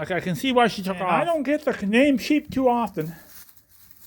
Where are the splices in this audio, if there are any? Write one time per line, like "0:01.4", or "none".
0:01.2